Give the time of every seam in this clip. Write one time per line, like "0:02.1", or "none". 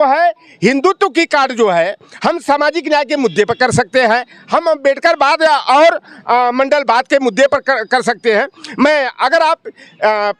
none